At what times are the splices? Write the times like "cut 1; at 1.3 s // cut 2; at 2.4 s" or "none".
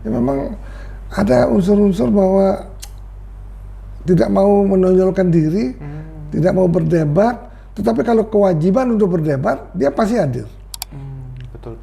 none

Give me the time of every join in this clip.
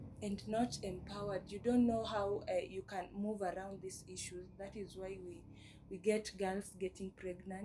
none

